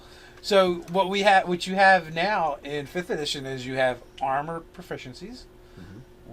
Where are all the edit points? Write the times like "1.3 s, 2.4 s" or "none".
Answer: 4.1 s